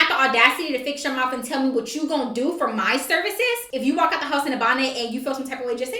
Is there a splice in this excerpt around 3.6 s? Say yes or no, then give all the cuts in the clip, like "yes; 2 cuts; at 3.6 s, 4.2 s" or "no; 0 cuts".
yes; 1 cut; at 3.6 s